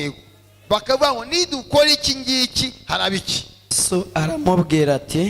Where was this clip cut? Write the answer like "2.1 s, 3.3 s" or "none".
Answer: 3.8 s